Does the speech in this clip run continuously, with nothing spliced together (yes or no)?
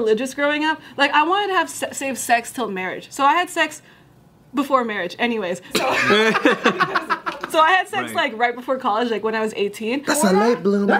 no